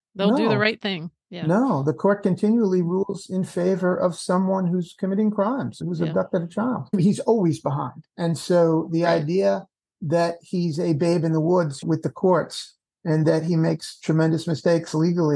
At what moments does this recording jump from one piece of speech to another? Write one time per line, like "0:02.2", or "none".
0:05.8
0:06.9